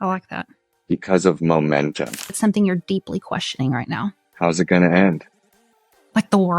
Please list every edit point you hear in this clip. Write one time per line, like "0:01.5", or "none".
0:02.4